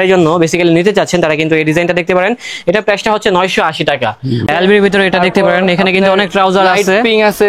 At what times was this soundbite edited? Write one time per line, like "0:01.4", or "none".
0:04.5